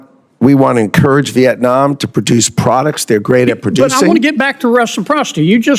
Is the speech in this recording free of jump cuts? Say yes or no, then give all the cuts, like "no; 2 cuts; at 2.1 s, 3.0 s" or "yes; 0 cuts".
yes; 0 cuts